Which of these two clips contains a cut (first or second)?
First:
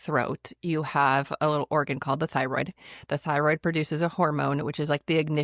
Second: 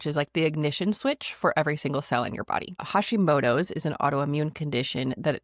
second